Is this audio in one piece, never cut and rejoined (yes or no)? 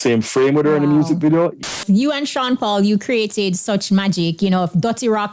no